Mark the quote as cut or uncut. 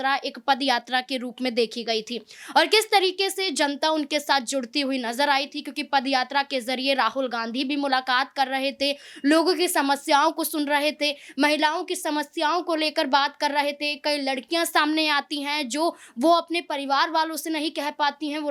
uncut